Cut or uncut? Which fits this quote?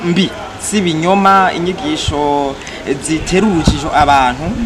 uncut